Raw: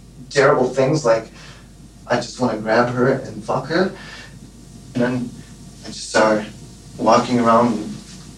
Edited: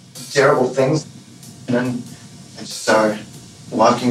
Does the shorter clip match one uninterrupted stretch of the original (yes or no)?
no